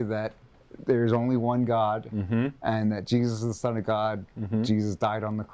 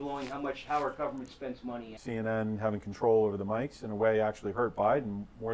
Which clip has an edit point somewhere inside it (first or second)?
second